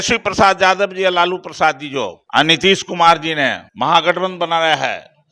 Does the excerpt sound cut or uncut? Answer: cut